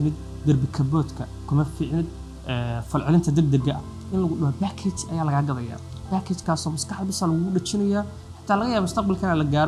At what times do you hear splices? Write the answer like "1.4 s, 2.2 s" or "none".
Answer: none